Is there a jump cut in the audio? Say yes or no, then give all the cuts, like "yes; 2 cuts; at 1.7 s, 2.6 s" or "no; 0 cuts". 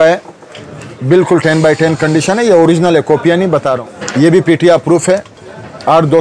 yes; 1 cut; at 3.9 s